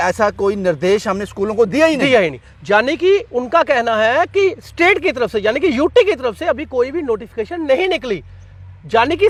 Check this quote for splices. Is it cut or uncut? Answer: uncut